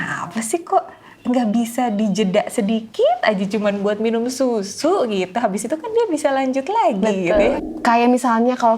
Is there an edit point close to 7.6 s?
yes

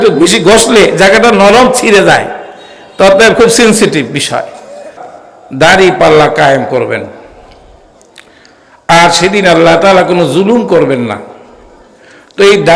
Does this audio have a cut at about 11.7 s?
no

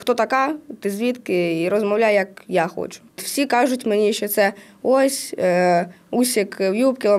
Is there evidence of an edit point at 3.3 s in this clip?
yes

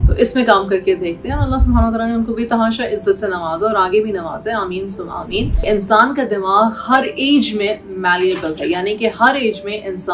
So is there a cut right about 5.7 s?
yes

